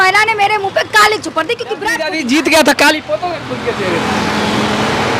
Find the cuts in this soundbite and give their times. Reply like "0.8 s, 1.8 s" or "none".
2.0 s